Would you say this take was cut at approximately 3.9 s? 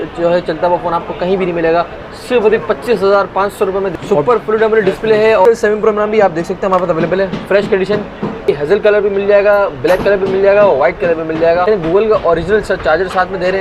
yes; 4 cuts; at 3.9 s, 5.4 s, 8.5 s, 11.7 s

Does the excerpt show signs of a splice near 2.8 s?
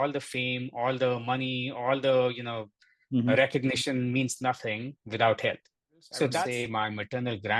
no; 1 cut; at 6.5 s

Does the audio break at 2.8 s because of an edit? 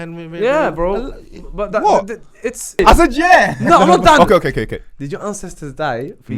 yes; 1 cut; at 2.8 s

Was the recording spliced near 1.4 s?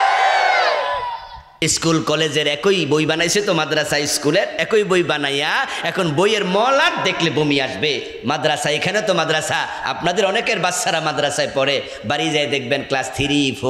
yes; 1 cut; at 1.4 s

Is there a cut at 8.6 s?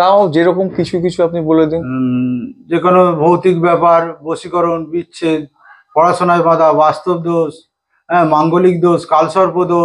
no; 0 cuts

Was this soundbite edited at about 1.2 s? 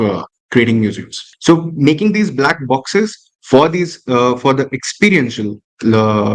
yes; 1 cut; at 1.2 s

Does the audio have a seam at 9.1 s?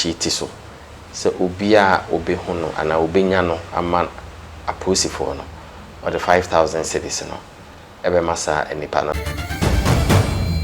yes; 1 cut; at 9.1 s

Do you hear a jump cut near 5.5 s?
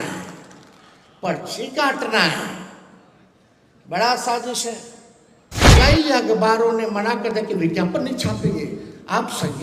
yes; 1 cut; at 5.5 s

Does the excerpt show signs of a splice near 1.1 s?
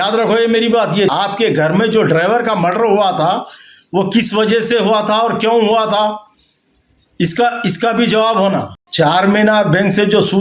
yes; 2 cuts; at 1.1 s, 8.8 s

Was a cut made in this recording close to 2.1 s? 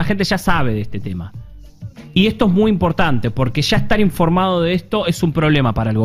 no; 0 cuts

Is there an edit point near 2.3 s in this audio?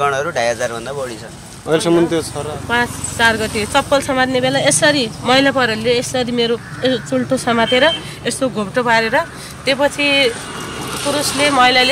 yes; 1 cut; at 2.3 s

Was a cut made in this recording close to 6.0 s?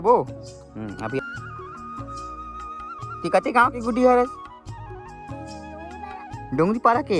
no; 1 cut; at 1.2 s

